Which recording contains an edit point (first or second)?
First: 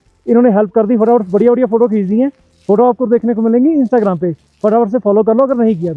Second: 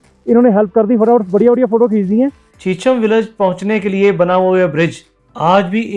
second